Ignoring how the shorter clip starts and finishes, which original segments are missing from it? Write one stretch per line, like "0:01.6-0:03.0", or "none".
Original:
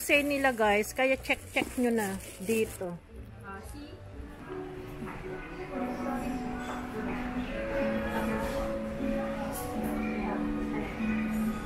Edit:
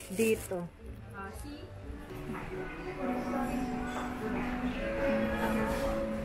0:04.4-0:04.8